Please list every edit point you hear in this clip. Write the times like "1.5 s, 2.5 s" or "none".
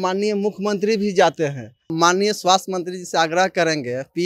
1.9 s